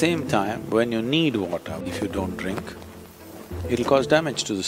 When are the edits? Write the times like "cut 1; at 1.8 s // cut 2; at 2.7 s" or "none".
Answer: cut 1; at 1.8 s